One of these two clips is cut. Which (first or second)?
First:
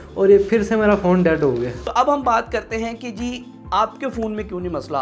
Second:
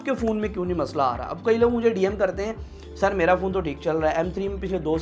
first